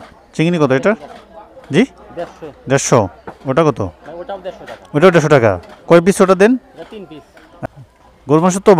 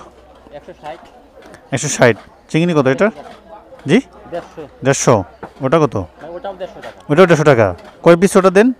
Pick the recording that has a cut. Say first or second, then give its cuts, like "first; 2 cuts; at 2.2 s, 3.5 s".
first; 1 cut; at 7.7 s